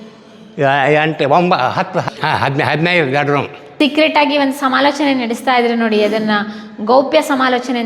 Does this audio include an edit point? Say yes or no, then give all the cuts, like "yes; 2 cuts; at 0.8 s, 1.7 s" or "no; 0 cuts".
yes; 2 cuts; at 2.1 s, 3.7 s